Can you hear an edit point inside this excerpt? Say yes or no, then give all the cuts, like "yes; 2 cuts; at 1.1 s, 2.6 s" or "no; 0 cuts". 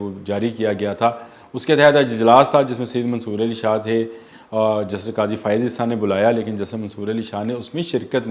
no; 0 cuts